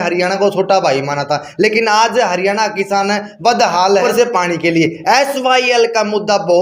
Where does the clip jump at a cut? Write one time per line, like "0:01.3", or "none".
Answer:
none